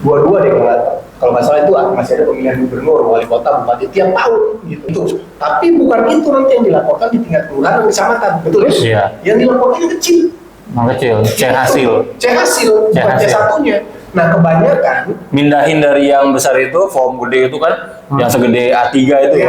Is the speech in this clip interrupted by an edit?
yes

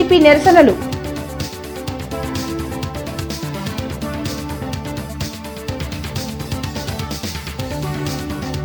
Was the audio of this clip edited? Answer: no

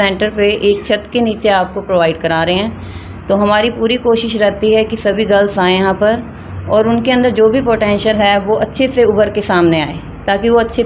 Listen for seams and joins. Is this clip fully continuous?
yes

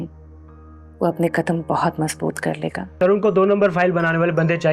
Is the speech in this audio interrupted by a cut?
yes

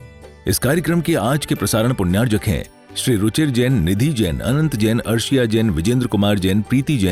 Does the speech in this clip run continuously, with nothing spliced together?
yes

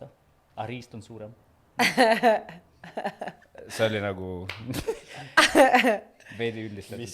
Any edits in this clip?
no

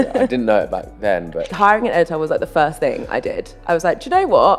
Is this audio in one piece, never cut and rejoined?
no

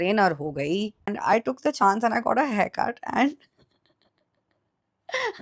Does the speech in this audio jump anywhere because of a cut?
yes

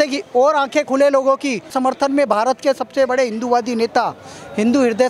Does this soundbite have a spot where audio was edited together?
yes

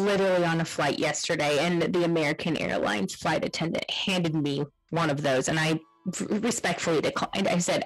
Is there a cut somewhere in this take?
no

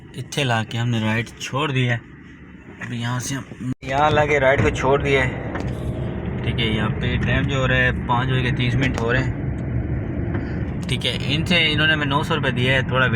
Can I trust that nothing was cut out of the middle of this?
no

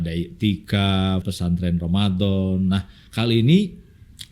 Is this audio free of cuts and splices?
no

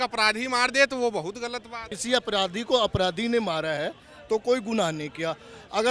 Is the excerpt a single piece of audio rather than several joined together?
no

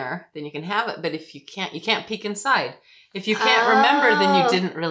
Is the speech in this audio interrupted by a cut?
no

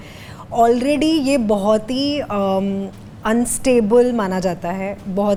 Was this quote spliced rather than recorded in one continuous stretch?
no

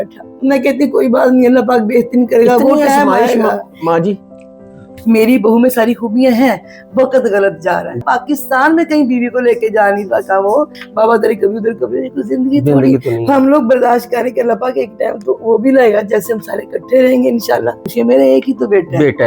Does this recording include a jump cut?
yes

